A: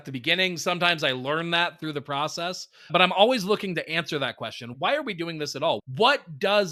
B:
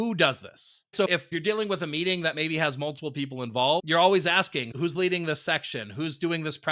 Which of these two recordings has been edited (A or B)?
B